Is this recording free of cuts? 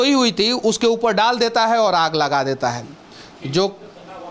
yes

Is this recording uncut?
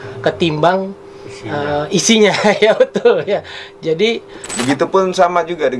no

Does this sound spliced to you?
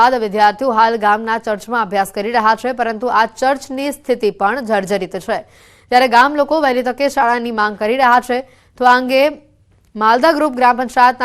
no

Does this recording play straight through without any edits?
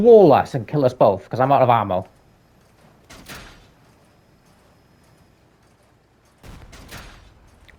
yes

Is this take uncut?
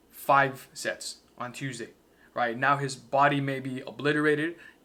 yes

